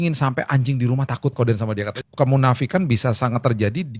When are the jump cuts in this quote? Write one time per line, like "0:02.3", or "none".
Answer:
0:02.0